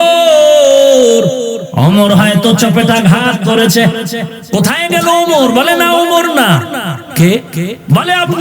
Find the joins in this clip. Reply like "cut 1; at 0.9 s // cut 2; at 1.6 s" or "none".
cut 1; at 1.6 s // cut 2; at 4.3 s